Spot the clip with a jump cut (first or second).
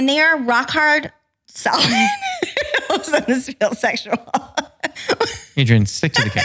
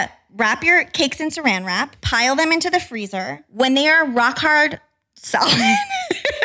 second